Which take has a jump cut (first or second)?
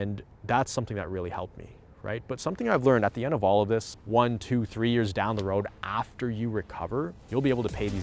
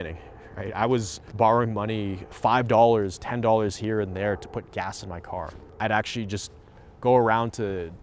second